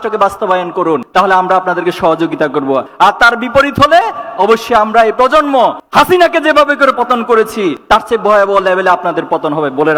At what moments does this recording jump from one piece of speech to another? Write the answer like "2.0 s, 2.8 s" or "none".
none